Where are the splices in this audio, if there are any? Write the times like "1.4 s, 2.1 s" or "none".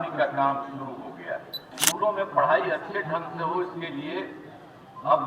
1.7 s